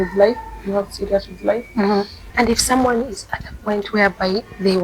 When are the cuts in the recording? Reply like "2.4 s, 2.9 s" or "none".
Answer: 2.2 s